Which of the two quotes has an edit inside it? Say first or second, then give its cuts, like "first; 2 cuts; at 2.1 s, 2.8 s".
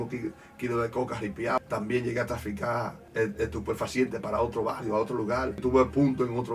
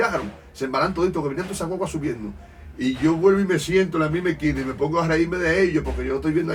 first; 3 cuts; at 1.6 s, 3.0 s, 5.6 s